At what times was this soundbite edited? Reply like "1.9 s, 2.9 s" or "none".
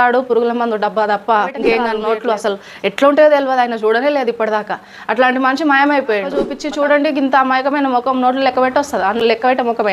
2.0 s, 6.6 s